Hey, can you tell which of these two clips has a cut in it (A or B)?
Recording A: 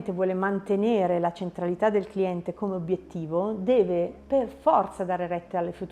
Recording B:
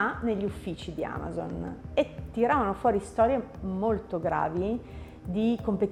A